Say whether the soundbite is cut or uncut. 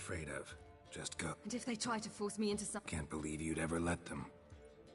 cut